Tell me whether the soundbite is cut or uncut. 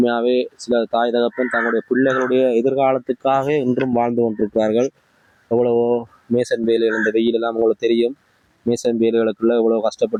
uncut